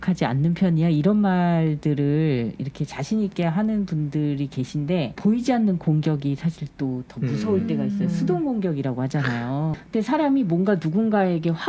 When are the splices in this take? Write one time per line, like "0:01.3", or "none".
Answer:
0:05.1
0:09.8